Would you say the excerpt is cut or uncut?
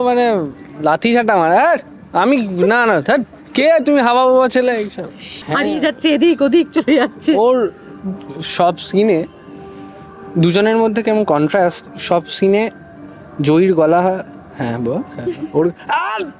cut